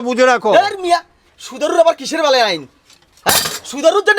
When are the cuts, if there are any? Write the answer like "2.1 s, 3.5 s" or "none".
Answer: none